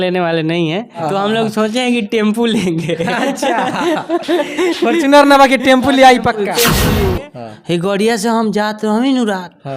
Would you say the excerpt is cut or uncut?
cut